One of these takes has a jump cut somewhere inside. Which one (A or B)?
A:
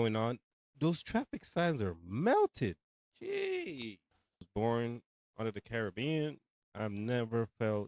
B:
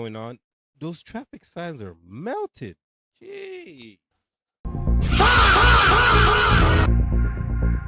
A